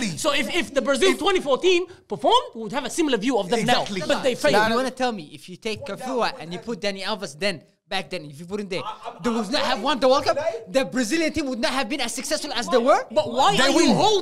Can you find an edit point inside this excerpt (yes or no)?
yes